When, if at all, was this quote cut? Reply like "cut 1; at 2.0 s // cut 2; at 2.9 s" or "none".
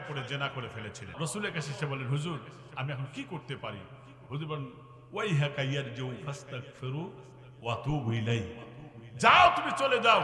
cut 1; at 1.1 s

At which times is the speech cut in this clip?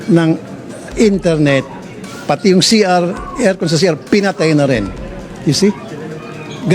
cut 1; at 1.8 s // cut 2; at 4.9 s

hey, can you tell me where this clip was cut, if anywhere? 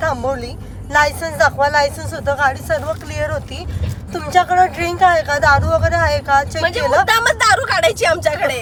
none

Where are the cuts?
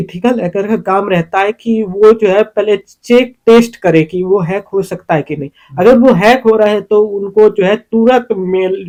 none

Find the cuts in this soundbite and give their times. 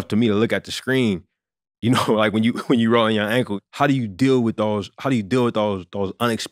cut 1; at 3.5 s

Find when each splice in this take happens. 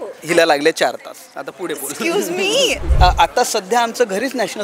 cut 1; at 2.8 s

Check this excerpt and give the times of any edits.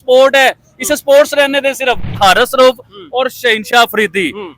cut 1; at 2.2 s

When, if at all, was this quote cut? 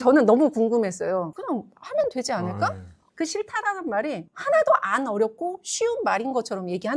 cut 1; at 3.0 s

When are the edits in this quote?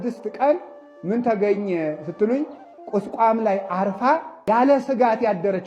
cut 1; at 4.4 s

